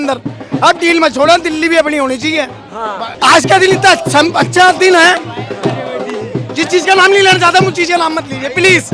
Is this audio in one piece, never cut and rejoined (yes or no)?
no